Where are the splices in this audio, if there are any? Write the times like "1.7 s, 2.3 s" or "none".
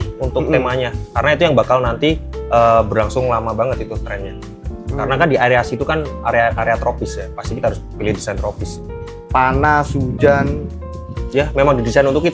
9.0 s